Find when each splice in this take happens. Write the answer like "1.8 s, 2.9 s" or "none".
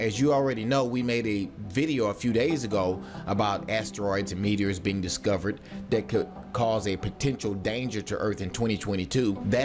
2.7 s